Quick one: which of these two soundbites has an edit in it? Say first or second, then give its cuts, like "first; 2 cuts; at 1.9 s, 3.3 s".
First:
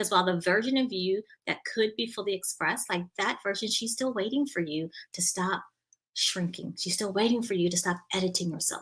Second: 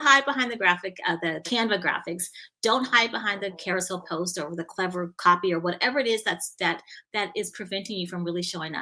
second; 1 cut; at 1.4 s